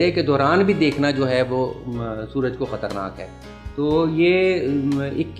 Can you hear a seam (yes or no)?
no